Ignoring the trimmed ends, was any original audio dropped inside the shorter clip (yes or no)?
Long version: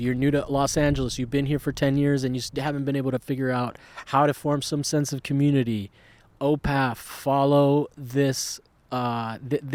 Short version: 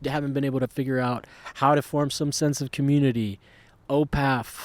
no